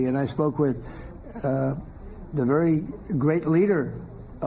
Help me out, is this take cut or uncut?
uncut